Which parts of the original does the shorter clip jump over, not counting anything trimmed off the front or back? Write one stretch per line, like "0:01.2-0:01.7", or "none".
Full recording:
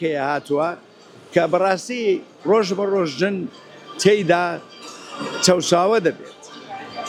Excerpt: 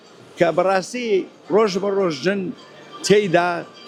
none